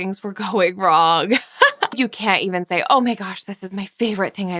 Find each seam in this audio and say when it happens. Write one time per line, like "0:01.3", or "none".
0:01.9